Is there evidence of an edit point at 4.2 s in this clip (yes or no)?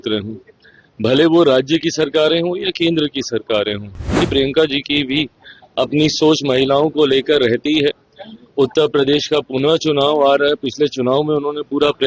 yes